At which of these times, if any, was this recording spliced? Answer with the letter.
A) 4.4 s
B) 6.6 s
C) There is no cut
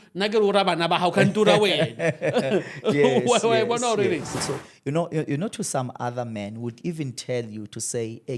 A